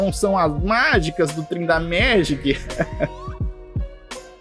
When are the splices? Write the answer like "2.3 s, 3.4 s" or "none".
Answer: 3.4 s